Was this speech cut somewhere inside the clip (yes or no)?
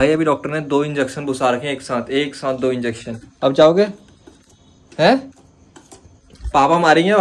no